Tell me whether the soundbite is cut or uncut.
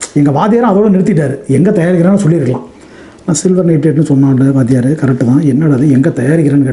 uncut